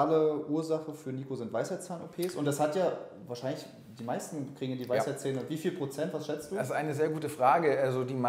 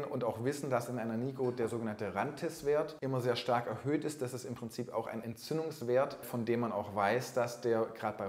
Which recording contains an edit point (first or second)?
second